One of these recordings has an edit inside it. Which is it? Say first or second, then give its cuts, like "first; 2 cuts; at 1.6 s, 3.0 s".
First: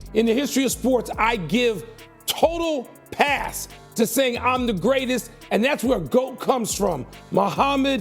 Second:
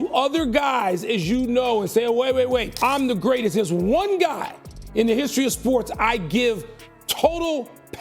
second; 1 cut; at 2.7 s